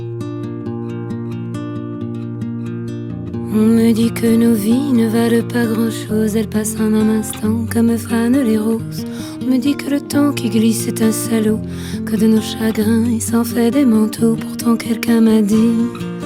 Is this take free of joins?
yes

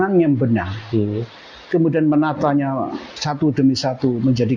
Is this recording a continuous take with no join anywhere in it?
yes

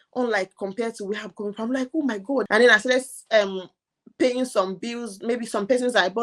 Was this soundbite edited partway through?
yes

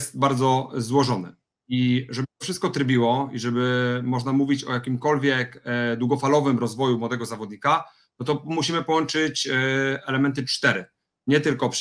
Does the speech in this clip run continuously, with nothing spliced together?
yes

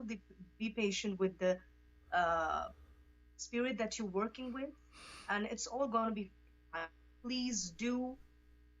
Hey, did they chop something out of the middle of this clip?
no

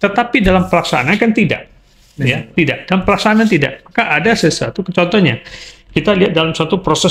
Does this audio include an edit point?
no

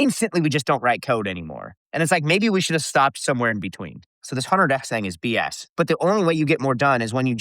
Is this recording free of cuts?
no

